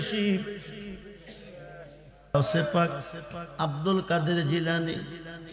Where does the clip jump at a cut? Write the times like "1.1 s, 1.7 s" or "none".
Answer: 2.3 s